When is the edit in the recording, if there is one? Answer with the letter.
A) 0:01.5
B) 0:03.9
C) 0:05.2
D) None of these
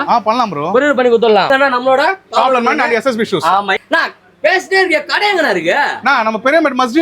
A